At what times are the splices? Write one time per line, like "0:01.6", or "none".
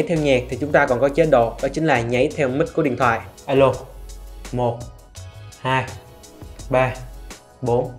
0:03.3